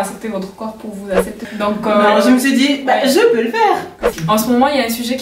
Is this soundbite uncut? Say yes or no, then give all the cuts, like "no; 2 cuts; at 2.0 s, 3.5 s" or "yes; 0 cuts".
no; 2 cuts; at 1.5 s, 4.0 s